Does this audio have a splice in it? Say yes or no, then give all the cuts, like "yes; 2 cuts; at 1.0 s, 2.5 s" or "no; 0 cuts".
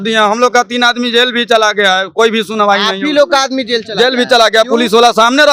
no; 0 cuts